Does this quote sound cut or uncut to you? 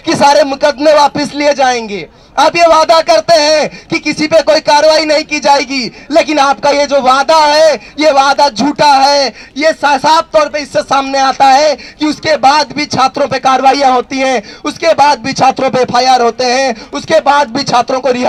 uncut